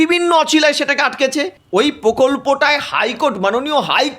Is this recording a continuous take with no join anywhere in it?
no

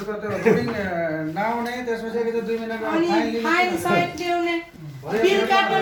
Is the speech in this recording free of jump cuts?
yes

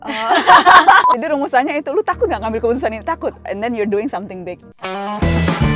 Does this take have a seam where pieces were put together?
yes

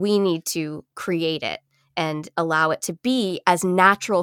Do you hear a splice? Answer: no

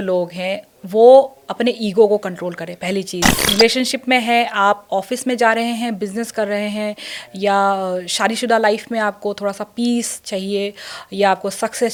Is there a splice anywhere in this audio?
no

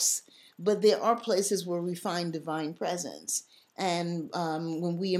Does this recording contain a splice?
no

